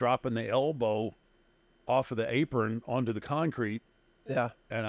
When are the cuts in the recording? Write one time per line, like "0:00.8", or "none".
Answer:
none